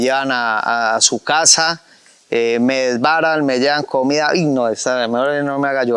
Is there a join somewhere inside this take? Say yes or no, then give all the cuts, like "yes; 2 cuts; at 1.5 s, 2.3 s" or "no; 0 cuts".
no; 0 cuts